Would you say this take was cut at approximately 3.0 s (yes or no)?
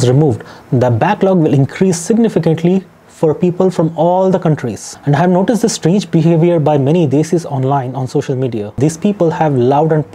no